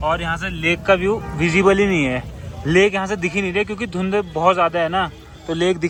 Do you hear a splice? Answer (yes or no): no